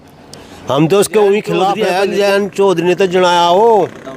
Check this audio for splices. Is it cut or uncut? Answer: cut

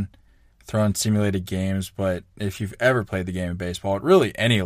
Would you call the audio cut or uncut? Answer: uncut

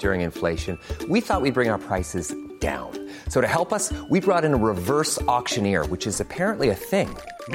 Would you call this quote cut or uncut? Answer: uncut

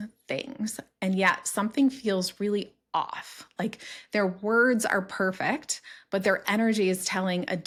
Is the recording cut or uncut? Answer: uncut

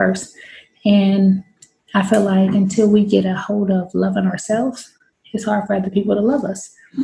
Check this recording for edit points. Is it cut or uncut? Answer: uncut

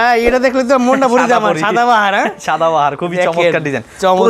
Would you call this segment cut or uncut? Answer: uncut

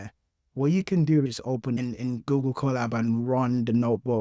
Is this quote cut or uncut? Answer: cut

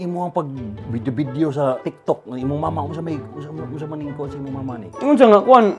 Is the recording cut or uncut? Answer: cut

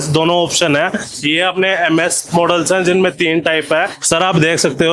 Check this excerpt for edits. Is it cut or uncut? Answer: cut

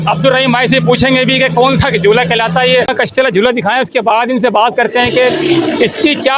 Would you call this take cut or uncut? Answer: cut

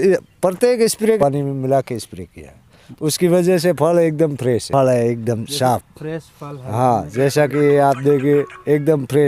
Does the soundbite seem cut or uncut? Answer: cut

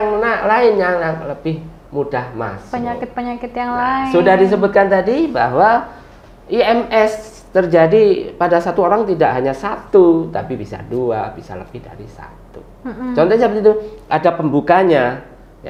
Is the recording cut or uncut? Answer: uncut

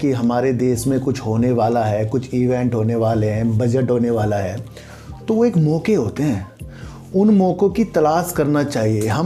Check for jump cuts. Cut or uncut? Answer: uncut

